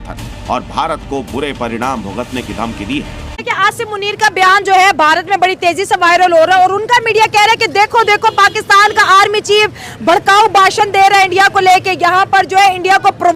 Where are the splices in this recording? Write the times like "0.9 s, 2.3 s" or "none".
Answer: 3.3 s